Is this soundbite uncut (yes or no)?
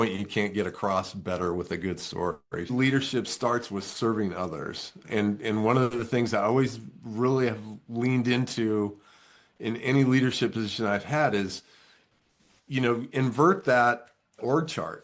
no